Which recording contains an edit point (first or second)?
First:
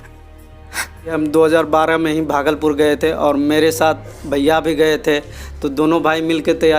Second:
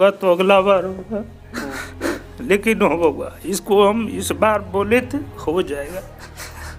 first